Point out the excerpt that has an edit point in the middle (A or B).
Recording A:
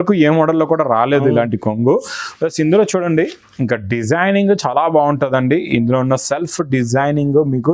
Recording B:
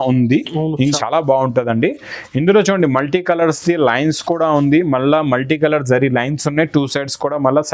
B